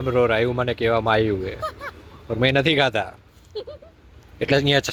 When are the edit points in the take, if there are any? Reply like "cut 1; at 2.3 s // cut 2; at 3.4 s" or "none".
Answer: none